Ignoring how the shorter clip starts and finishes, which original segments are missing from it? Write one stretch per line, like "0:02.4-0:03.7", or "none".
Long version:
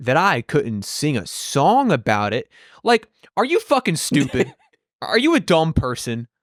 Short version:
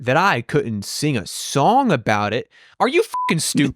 0:02.6-0:03.2